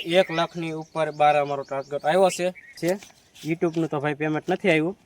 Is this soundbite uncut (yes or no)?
no